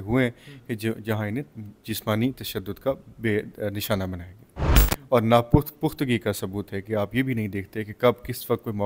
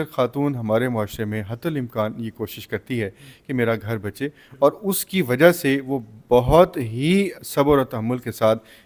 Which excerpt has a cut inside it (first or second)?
first